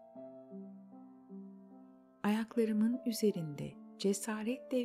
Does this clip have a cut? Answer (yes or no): yes